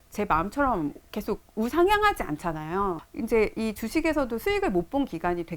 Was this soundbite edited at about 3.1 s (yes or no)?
yes